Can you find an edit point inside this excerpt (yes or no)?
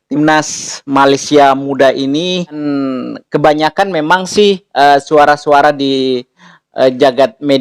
yes